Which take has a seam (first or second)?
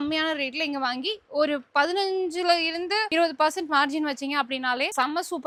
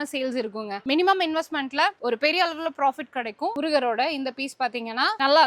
second